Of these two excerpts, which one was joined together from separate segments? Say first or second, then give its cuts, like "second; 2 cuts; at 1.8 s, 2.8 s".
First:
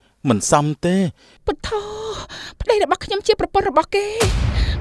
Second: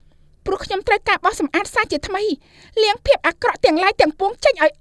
first; 1 cut; at 1.3 s